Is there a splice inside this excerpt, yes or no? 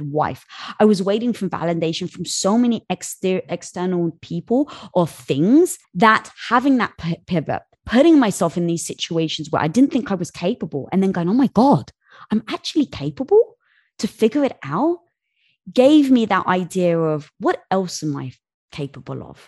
yes